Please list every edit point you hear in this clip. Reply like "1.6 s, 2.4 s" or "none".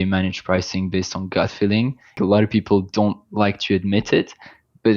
2.2 s